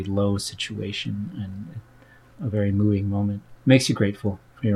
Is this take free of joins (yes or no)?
no